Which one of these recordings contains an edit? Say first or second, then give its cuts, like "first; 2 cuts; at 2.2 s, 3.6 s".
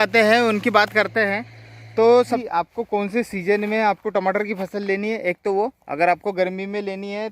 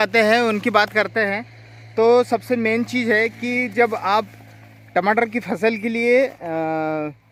first; 1 cut; at 2.4 s